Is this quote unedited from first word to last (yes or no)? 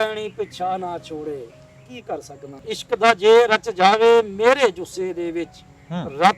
no